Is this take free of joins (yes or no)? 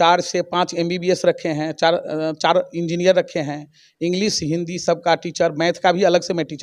yes